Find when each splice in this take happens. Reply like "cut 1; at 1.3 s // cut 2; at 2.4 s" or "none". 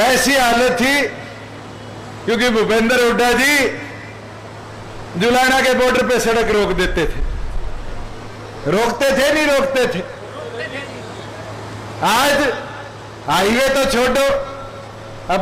none